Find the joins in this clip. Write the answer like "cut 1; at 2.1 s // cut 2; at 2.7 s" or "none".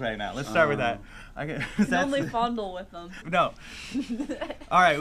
cut 1; at 3.2 s